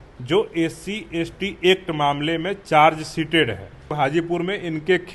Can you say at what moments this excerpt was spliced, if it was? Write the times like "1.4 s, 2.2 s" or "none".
3.7 s